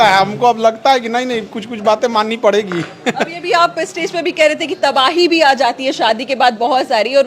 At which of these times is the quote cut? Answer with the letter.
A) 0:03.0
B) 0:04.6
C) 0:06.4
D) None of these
D